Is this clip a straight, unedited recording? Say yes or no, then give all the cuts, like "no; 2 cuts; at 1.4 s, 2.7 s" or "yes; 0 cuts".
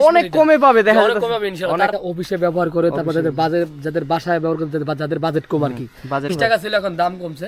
no; 2 cuts; at 1.9 s, 6.3 s